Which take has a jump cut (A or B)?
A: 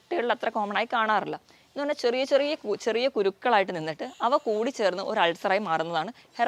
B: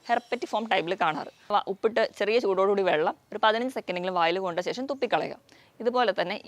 B